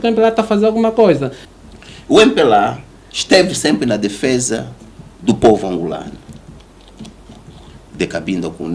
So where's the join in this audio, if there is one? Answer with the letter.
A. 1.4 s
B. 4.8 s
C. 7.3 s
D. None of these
A